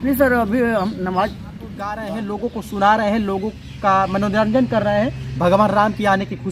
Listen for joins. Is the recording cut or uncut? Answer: cut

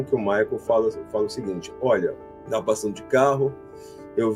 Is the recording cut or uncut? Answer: cut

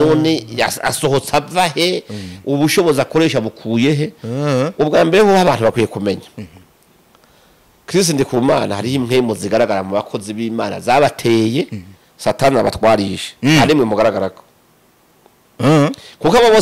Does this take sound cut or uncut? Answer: uncut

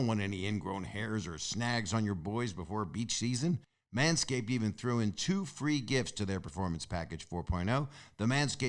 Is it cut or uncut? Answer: cut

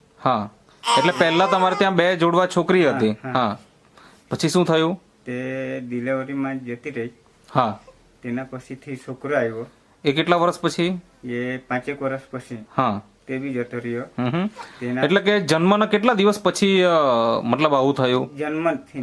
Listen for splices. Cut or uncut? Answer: uncut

